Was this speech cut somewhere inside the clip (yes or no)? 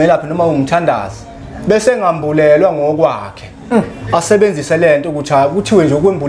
no